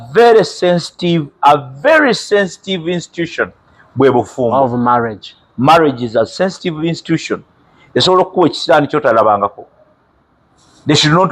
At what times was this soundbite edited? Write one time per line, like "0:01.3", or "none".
none